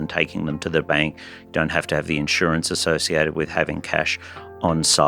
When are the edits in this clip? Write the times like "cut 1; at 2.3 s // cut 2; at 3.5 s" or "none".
none